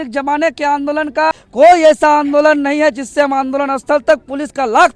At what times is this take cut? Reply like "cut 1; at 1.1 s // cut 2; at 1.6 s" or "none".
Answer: cut 1; at 1.4 s